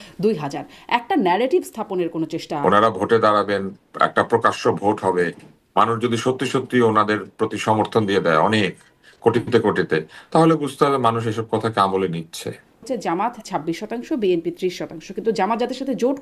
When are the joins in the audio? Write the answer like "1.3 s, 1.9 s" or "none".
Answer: 2.5 s, 12.9 s